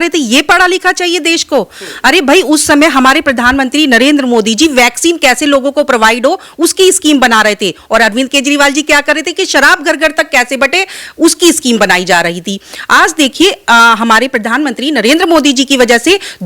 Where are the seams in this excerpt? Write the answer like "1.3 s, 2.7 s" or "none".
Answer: none